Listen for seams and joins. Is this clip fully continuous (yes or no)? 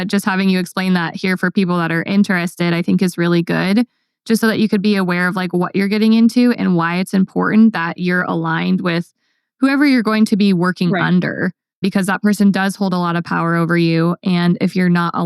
yes